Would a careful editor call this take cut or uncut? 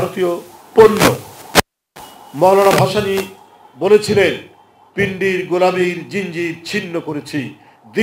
uncut